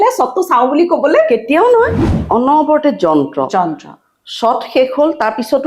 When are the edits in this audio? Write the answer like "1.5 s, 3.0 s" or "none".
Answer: 2.0 s